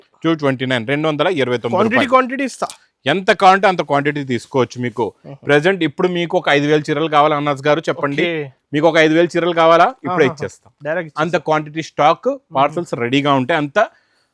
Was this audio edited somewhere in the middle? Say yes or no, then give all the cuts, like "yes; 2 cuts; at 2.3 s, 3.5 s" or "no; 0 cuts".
no; 0 cuts